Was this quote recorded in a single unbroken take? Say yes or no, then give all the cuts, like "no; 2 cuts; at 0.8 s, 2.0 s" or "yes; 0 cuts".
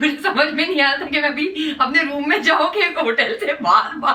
yes; 0 cuts